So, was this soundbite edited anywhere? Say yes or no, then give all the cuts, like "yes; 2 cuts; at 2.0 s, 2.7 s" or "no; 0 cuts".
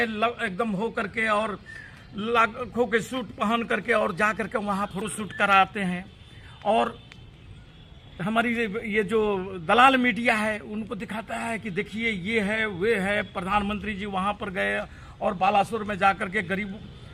no; 0 cuts